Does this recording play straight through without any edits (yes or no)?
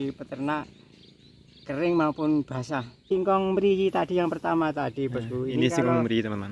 no